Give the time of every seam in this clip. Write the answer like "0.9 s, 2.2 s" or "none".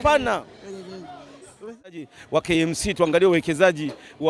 1.9 s